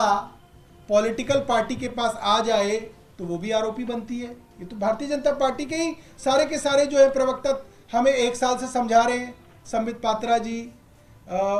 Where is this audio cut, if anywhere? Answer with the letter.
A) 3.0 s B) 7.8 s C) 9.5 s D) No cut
D